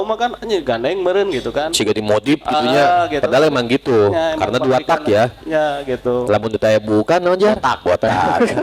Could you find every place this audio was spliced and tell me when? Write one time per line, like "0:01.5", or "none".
none